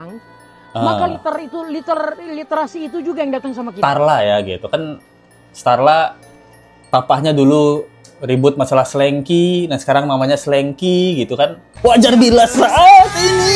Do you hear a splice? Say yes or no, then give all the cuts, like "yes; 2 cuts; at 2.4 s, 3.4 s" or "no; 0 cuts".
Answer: yes; 1 cut; at 3.6 s